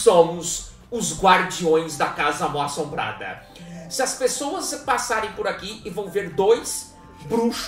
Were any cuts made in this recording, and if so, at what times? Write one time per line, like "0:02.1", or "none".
none

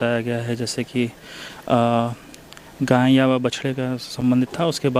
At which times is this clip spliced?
none

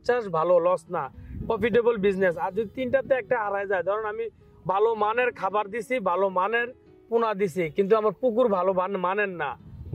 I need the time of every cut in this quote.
none

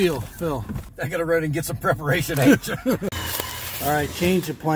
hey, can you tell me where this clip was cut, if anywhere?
0:00.9
0:03.1

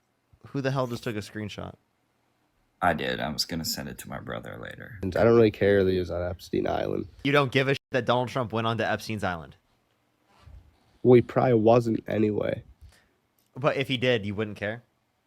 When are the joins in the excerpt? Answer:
0:05.0
0:07.2

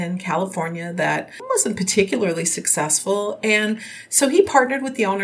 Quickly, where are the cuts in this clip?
0:01.3

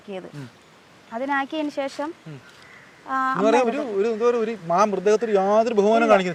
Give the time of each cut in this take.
none

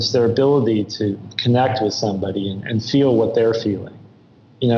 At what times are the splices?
0:01.3

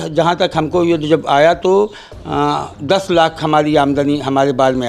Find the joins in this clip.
none

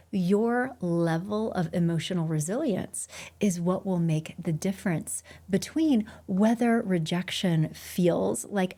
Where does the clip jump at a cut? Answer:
none

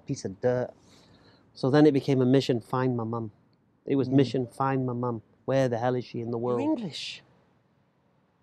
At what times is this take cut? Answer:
0:06.7

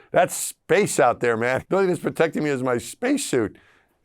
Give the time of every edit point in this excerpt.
0:01.6

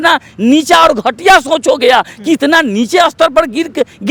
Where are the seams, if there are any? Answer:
none

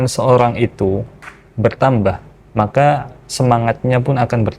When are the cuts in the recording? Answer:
0:02.3

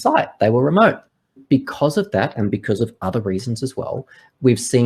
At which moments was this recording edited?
none

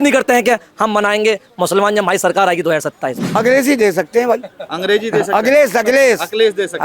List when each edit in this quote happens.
0:03.2

